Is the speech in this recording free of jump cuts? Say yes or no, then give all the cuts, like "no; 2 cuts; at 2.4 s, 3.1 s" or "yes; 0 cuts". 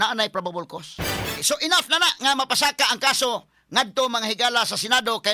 no; 1 cut; at 1.4 s